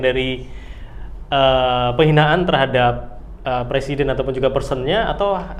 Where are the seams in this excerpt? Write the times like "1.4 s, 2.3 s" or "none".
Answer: none

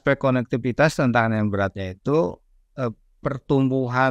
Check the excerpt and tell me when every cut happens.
none

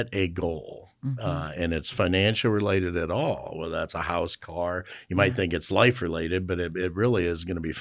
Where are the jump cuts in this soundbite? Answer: none

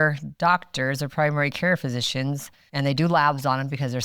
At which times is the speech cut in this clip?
none

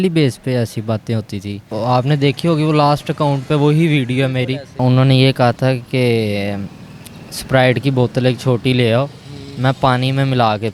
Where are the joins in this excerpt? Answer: 1.6 s, 4.8 s

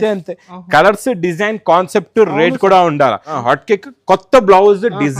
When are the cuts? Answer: 3.3 s

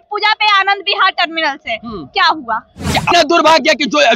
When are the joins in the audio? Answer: 3.1 s

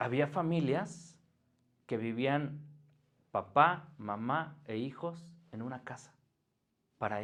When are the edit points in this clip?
none

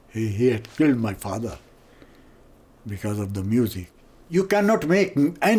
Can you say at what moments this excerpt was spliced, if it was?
3.9 s

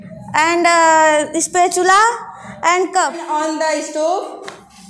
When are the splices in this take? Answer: 3.2 s

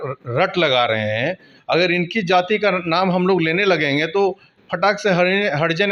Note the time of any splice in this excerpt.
none

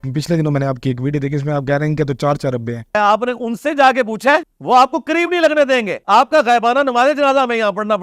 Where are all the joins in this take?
2.9 s, 4.5 s, 6.0 s

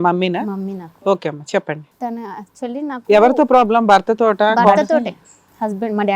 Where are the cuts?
4.9 s

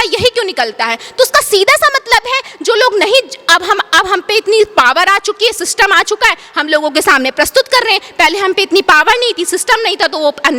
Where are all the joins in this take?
none

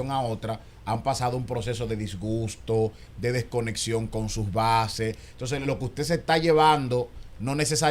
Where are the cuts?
none

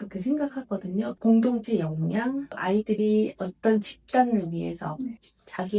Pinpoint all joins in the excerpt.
1.1 s, 2.5 s

